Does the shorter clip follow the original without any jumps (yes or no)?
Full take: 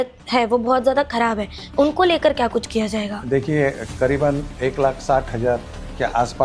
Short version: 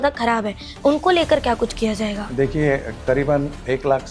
yes